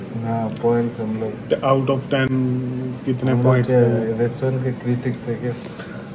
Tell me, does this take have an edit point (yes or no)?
no